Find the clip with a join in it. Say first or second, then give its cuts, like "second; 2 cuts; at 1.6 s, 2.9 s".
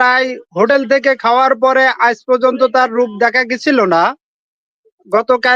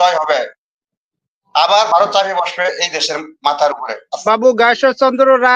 second; 1 cut; at 4.1 s